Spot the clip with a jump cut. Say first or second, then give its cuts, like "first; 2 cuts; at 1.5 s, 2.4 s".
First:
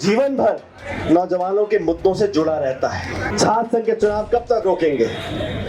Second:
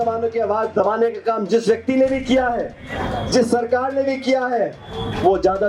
first; 1 cut; at 3.3 s